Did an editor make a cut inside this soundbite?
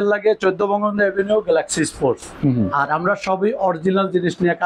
no; 0 cuts

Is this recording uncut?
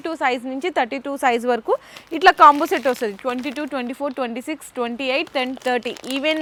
yes; 0 cuts

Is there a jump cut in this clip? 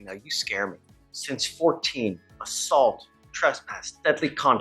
yes; 1 cut; at 1.3 s

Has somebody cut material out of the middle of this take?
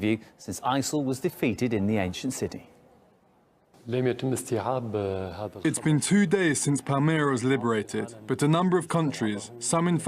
yes; 1 cut; at 2.8 s

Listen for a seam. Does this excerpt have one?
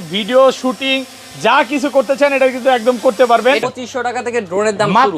yes; 1 cut; at 3.6 s

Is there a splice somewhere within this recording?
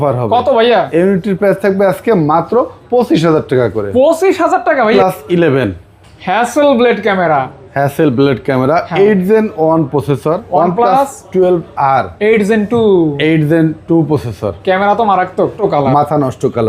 yes; 3 cuts; at 4.9 s, 10.4 s, 15.6 s

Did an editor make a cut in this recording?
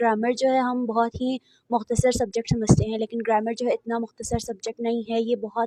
no; 0 cuts

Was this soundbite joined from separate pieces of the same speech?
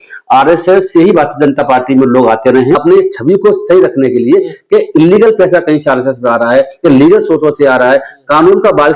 yes; 1 cut; at 2.8 s

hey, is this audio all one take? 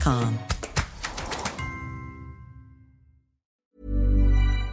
no; 1 cut; at 3.6 s

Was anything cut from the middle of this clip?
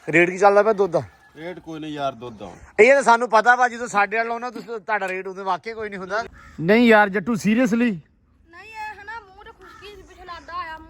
yes; 1 cut; at 6.4 s

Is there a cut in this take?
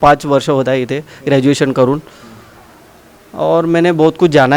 no; 0 cuts

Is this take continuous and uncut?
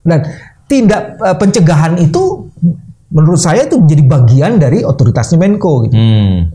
yes; 0 cuts

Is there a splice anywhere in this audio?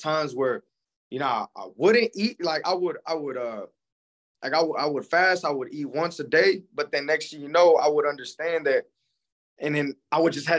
no; 0 cuts

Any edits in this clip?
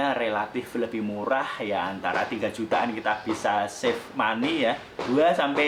no; 0 cuts

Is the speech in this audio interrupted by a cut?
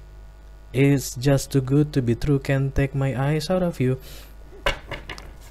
no; 0 cuts

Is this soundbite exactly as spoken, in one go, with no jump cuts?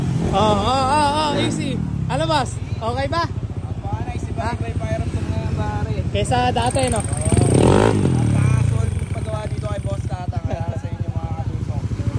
yes; 0 cuts

